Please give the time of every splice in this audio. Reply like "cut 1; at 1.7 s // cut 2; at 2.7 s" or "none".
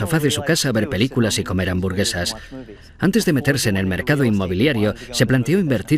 cut 1; at 2.9 s